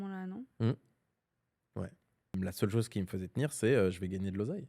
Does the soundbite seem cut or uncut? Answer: cut